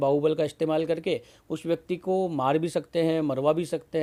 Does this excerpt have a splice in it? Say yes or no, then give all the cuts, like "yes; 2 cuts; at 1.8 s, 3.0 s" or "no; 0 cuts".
no; 0 cuts